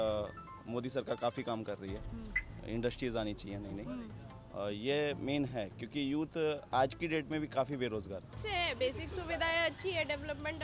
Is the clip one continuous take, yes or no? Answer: no